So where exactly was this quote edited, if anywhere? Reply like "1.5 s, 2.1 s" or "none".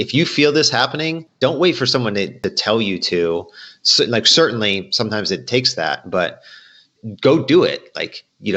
1.3 s, 2.3 s, 6.9 s